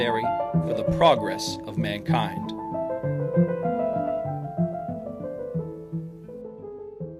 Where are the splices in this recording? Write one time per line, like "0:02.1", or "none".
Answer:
none